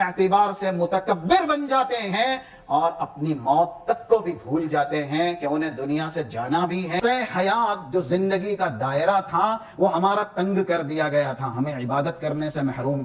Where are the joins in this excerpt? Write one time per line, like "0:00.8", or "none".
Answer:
0:07.0